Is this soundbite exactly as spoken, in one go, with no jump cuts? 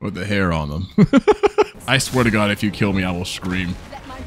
no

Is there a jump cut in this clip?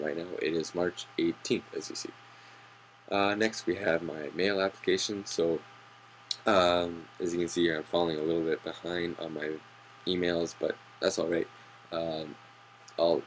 no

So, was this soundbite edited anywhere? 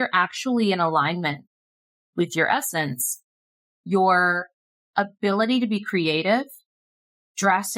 no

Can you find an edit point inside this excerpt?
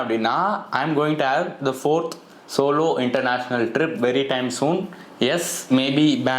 no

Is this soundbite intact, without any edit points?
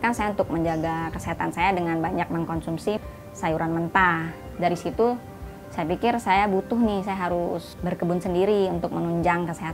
no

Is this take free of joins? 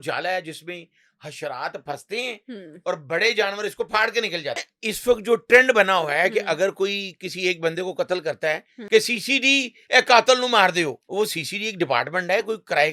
no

